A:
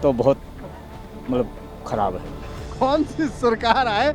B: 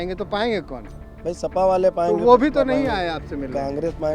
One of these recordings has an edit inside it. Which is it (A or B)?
A